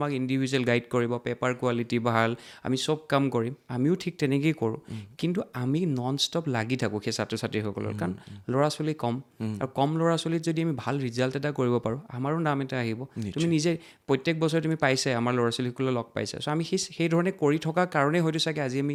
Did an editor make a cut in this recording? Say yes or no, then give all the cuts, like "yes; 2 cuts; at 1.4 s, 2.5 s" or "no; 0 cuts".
no; 0 cuts